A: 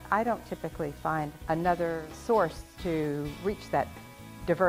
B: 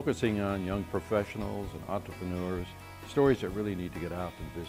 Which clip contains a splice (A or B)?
A